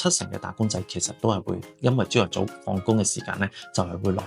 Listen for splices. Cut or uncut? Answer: uncut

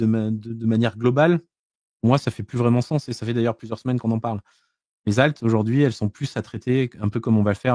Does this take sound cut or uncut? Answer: uncut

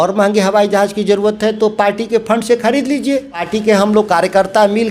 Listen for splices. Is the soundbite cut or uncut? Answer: cut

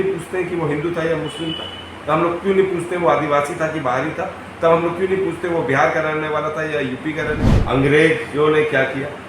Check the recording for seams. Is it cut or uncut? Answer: cut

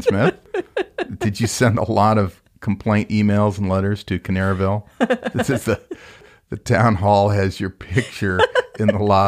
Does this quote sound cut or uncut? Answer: uncut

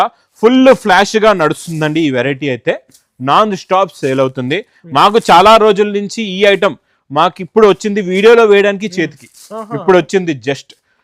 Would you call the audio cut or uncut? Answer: uncut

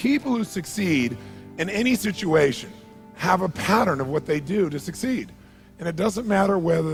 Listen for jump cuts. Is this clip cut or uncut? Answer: uncut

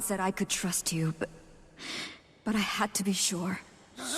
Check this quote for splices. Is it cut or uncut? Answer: uncut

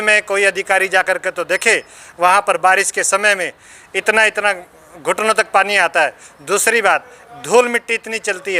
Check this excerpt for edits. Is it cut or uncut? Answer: uncut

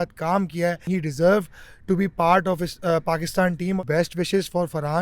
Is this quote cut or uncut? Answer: cut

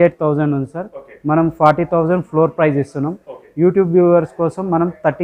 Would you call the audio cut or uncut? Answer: uncut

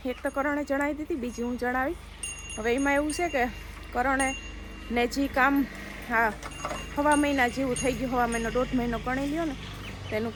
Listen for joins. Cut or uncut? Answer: uncut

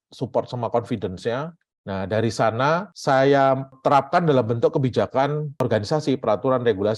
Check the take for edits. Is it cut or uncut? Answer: uncut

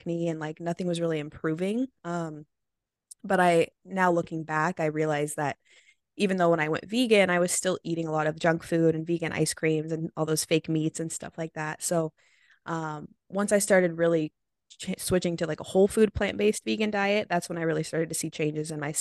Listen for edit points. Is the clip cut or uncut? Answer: uncut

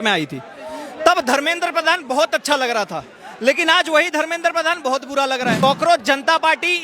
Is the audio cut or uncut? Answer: cut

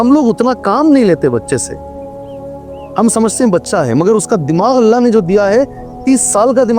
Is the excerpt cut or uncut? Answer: cut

